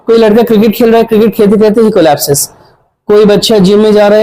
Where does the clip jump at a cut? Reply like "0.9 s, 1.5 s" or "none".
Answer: none